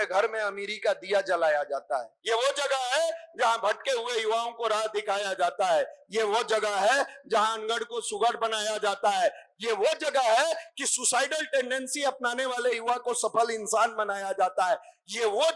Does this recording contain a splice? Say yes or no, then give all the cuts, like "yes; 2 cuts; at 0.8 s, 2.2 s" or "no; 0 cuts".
yes; 1 cut; at 2.1 s